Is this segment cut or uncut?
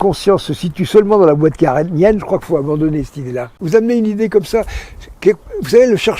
cut